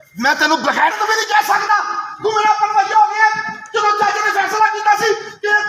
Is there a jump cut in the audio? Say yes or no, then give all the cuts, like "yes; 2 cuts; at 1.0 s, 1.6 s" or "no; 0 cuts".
no; 0 cuts